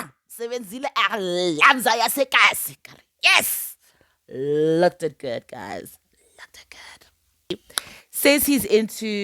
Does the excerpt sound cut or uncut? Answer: cut